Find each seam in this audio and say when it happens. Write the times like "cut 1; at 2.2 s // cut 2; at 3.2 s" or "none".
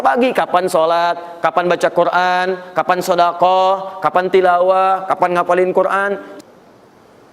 cut 1; at 6.3 s